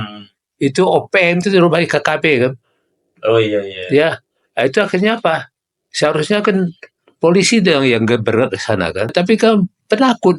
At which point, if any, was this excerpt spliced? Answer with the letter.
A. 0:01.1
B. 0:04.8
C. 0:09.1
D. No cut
C